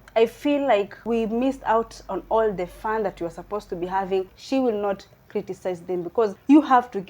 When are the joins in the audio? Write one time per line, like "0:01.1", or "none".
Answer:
0:01.0
0:04.3